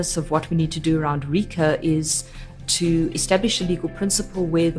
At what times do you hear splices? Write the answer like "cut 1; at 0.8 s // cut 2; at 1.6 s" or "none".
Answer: cut 1; at 2.6 s